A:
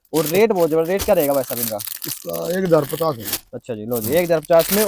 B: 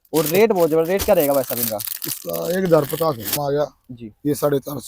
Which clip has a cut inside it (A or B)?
B